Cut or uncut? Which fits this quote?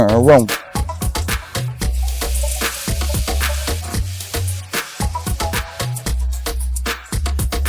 uncut